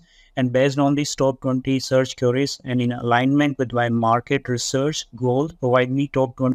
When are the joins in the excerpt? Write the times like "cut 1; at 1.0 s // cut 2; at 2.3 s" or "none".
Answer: none